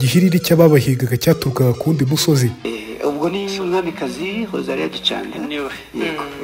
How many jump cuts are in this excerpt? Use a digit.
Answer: 1